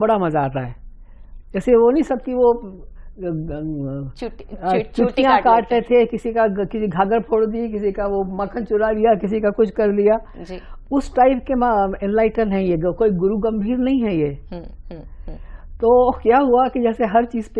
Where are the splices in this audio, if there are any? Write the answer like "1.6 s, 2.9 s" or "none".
none